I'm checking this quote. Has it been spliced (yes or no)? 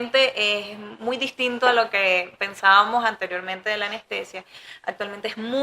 no